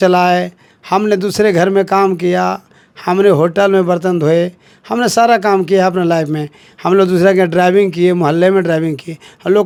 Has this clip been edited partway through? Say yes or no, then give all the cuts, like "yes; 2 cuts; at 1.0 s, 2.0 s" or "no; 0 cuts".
no; 0 cuts